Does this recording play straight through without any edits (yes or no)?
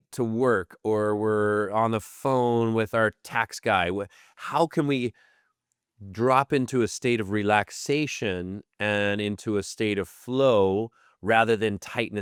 yes